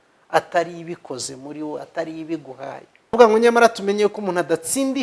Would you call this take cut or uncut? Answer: cut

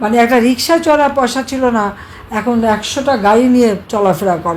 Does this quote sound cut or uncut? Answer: uncut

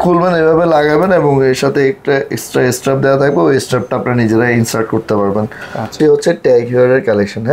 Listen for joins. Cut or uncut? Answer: cut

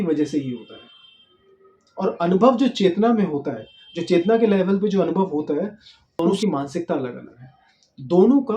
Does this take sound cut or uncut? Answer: cut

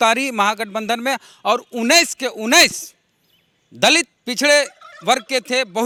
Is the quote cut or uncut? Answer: uncut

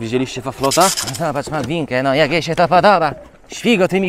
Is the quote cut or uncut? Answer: cut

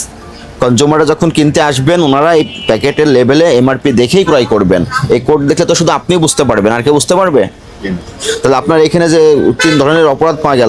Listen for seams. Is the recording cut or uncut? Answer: uncut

